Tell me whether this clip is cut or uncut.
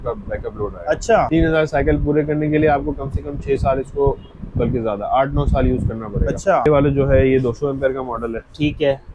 cut